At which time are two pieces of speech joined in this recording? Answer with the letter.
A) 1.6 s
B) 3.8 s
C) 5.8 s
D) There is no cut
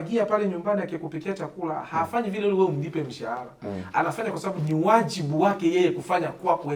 D